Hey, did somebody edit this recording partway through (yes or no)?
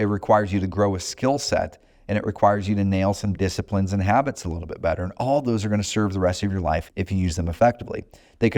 yes